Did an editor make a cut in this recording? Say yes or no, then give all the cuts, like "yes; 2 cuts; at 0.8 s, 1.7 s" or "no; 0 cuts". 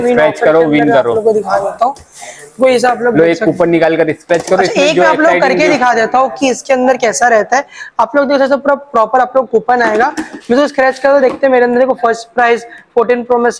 no; 0 cuts